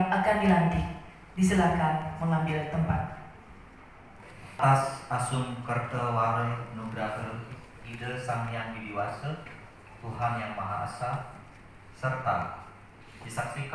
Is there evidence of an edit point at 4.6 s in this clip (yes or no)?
yes